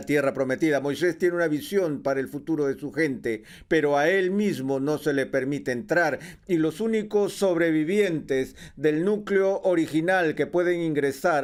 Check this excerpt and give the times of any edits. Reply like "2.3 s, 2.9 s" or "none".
none